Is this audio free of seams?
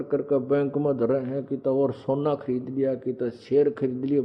yes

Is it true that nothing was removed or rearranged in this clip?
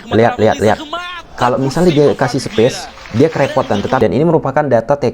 no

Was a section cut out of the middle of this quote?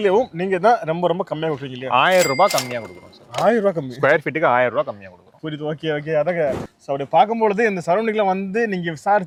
no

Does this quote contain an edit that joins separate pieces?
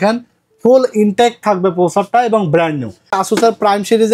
yes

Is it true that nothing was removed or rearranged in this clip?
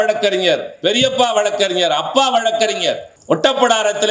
no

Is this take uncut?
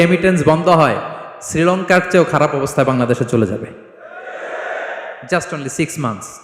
yes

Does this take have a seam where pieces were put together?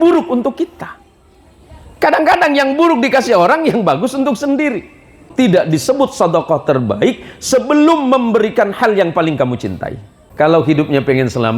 yes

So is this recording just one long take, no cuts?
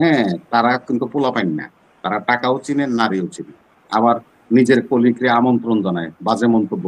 yes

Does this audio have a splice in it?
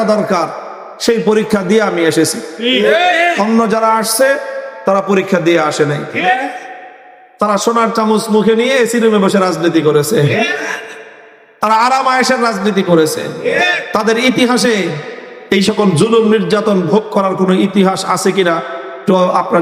no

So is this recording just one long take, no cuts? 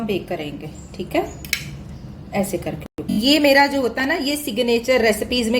no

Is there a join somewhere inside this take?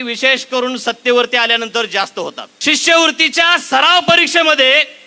yes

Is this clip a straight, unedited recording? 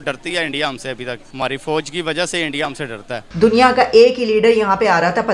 no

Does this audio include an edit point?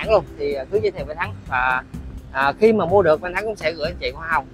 no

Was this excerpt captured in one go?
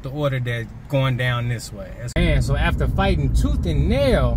yes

